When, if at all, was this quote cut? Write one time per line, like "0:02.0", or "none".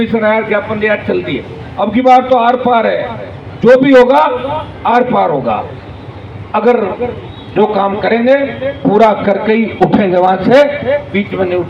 none